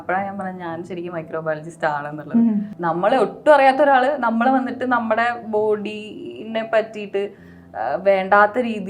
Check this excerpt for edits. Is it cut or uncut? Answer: cut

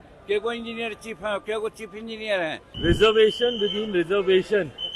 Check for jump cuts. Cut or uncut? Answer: cut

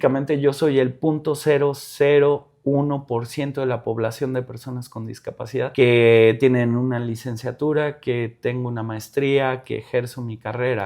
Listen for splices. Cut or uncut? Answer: cut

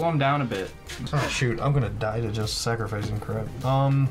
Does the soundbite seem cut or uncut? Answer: cut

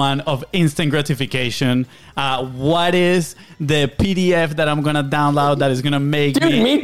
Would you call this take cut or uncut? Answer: uncut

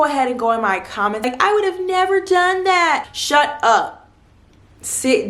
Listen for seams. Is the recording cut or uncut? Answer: cut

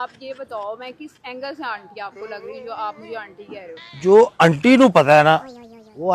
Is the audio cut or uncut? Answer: cut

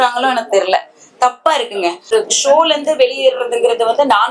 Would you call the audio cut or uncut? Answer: cut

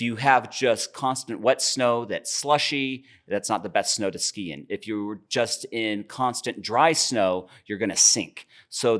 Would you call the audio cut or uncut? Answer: uncut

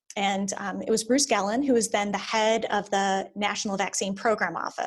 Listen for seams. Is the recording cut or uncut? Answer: uncut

